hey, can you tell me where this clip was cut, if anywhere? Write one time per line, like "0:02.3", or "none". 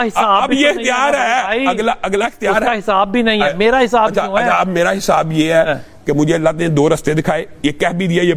none